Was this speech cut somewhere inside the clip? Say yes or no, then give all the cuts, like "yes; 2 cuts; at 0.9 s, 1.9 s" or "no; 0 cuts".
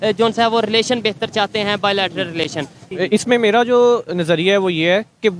yes; 1 cut; at 2.8 s